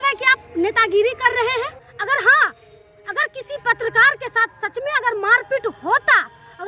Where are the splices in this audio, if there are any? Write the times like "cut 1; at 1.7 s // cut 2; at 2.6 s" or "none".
cut 1; at 1.9 s